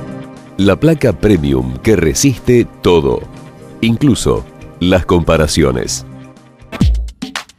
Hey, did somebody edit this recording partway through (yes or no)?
yes